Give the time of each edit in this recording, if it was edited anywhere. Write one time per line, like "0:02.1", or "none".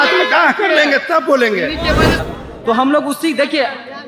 0:02.3